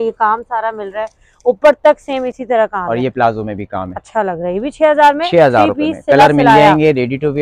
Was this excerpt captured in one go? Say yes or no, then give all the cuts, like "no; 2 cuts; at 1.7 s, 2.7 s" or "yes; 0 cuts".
yes; 0 cuts